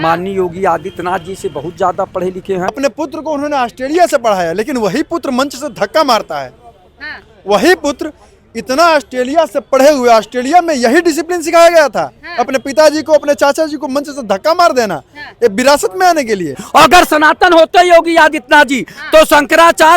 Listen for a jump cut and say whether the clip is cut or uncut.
cut